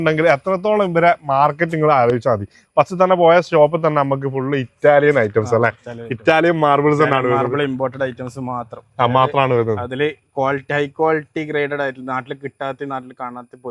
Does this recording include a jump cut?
no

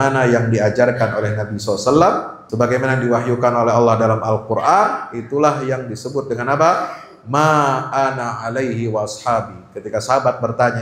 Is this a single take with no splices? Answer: no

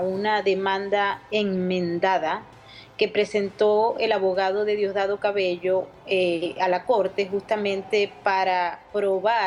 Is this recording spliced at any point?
yes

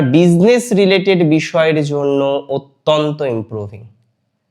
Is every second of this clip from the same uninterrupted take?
yes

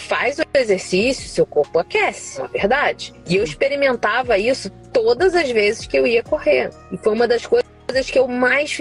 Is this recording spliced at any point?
no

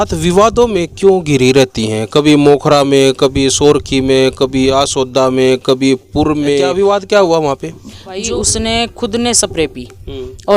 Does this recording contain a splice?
yes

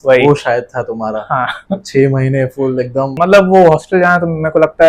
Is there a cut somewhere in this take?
yes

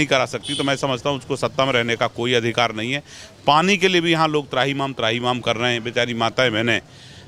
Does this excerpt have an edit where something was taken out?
no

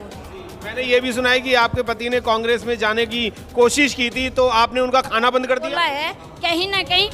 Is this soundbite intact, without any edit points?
no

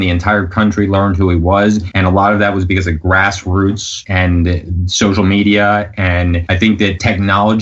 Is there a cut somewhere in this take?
yes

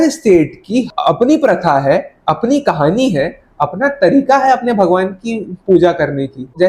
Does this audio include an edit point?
no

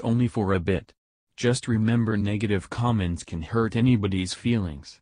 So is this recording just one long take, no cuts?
yes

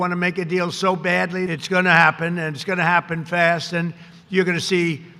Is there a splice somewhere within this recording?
yes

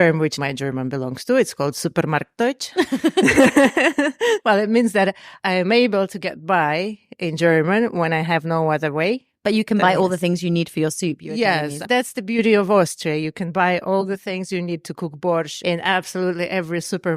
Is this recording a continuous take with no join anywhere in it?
no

